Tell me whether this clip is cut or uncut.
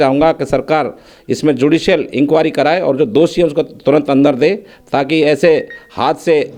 uncut